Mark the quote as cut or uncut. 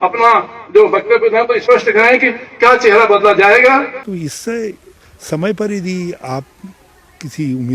cut